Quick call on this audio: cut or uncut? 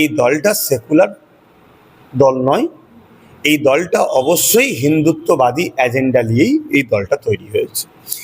uncut